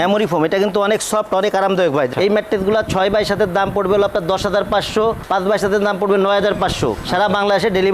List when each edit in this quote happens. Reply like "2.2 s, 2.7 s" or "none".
2.1 s